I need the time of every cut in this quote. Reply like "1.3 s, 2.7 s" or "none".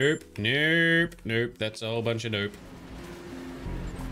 none